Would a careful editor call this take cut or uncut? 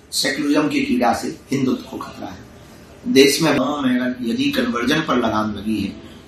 cut